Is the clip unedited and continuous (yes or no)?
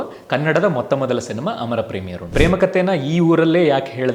no